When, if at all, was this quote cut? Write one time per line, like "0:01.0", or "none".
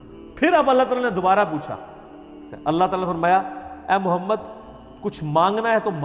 0:02.4